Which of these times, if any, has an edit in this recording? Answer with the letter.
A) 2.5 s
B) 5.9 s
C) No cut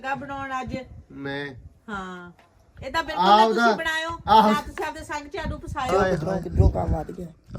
B